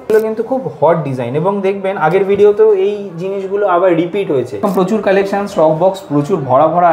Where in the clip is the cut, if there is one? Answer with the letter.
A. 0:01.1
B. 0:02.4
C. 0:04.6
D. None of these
C